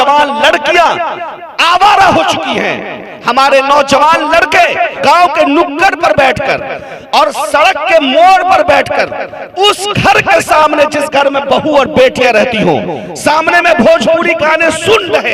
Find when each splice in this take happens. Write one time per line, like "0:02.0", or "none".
0:04.9